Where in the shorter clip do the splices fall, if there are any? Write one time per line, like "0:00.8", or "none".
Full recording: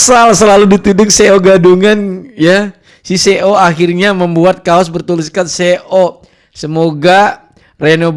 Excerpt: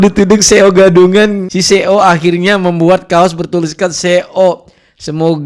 0:01.5